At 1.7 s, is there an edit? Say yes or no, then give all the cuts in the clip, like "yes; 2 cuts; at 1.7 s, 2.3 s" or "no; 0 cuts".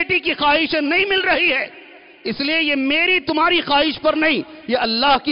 no; 0 cuts